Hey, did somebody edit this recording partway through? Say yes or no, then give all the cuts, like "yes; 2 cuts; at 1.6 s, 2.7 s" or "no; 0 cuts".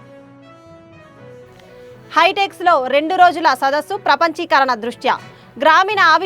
yes; 1 cut; at 1.4 s